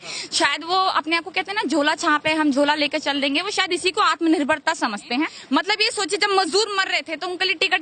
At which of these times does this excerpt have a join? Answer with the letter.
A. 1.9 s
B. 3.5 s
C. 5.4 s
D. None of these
C